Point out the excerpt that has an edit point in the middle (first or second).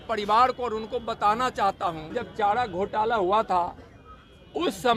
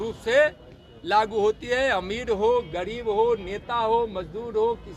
first